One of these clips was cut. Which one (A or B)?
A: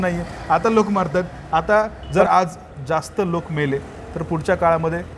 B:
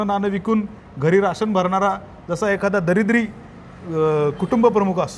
A